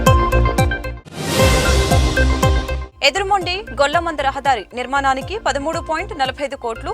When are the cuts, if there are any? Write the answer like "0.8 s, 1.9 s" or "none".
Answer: 0.9 s, 2.8 s

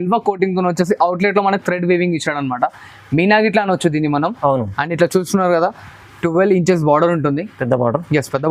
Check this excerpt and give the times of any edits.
none

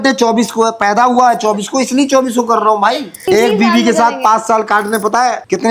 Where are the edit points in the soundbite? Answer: 3.3 s

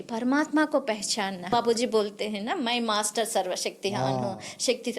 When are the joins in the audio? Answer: 1.5 s

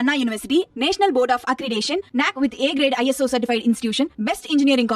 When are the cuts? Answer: none

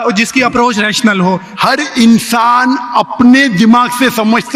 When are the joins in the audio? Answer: 1.5 s

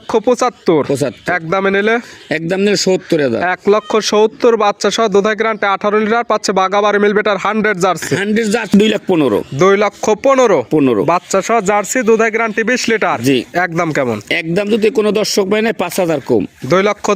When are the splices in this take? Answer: 8.7 s

